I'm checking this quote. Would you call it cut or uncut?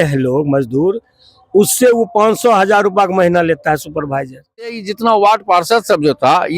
cut